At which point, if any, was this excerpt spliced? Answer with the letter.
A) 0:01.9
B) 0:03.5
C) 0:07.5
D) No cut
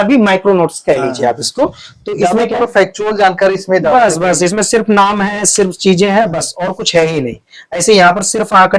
D